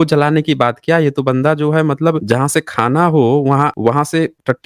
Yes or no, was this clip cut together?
yes